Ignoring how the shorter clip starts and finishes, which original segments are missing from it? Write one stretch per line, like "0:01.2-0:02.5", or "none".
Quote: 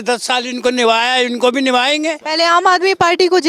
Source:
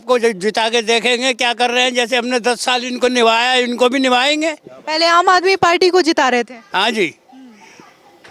0:04.6-0:04.8